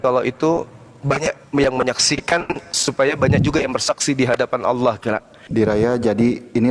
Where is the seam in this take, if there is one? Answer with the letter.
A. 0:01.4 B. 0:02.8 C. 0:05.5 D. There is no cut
C